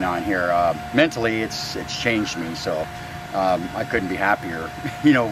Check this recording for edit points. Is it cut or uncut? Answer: uncut